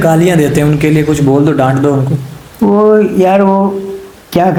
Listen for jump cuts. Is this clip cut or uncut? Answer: uncut